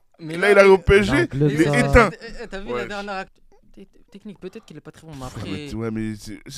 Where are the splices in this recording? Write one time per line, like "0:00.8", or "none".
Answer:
0:03.4